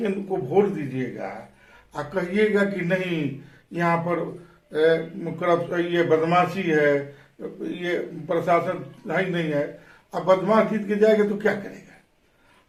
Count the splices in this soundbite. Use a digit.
0